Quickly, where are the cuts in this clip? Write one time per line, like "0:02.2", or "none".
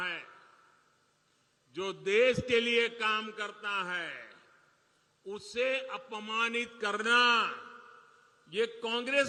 none